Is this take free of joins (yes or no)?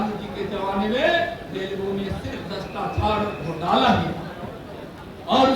yes